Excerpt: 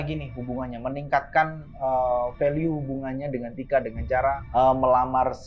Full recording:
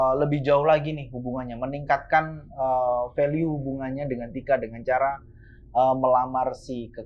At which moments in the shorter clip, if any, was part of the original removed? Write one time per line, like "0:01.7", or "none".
0:04.4